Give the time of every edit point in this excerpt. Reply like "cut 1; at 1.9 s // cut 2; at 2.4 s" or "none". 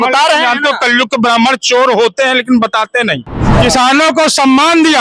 cut 1; at 3.4 s